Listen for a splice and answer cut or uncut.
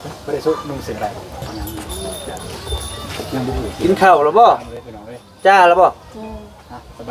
cut